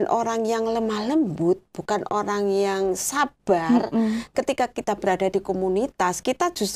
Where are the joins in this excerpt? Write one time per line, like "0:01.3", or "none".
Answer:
none